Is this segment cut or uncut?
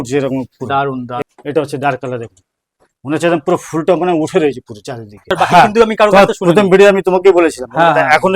cut